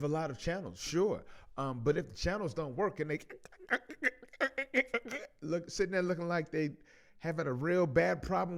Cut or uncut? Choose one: uncut